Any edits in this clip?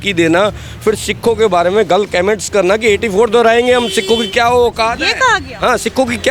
no; 0 cuts

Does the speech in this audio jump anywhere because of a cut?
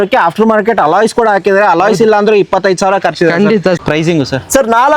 yes; 1 cut; at 3.8 s

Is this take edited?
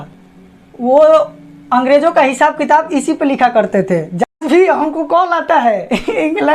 yes; 1 cut; at 4.2 s

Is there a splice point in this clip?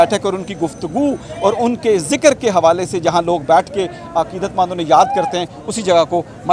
no; 0 cuts

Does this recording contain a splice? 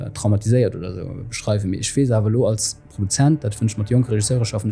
no; 0 cuts

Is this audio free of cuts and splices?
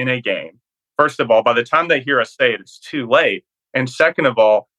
yes; 0 cuts

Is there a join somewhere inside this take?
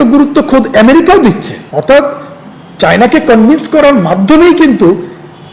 no; 0 cuts

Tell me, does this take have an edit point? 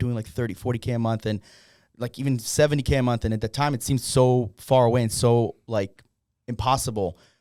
no; 0 cuts

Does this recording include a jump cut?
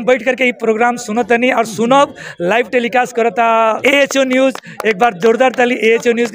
yes; 1 cut; at 3.8 s

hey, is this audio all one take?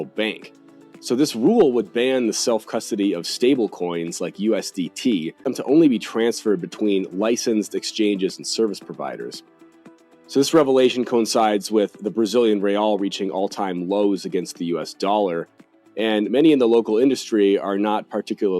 no; 1 cut; at 5.3 s

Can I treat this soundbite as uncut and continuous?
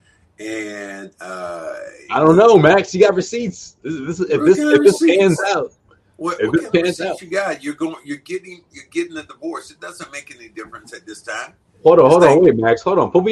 yes; 0 cuts

